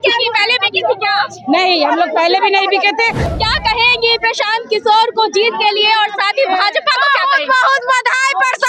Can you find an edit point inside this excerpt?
yes; 1 cut; at 3.3 s

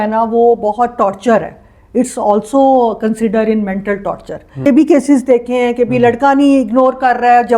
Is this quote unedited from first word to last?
no; 1 cut; at 4.7 s

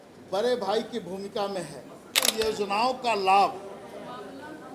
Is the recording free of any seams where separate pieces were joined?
no; 1 cut; at 2.3 s

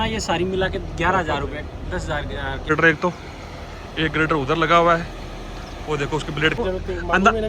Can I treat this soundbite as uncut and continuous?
no; 2 cuts; at 2.7 s, 6.6 s

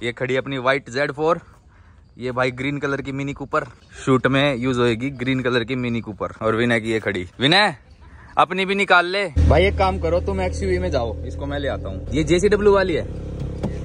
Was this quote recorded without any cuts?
yes; 0 cuts

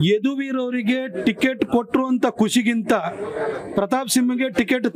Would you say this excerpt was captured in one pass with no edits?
yes; 0 cuts

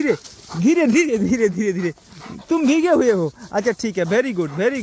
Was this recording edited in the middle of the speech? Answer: no; 0 cuts

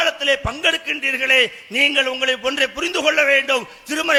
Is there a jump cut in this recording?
no; 0 cuts

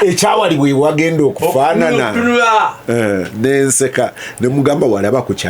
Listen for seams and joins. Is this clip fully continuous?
yes; 0 cuts

